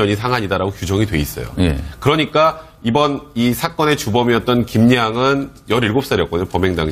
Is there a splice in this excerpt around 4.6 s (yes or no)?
yes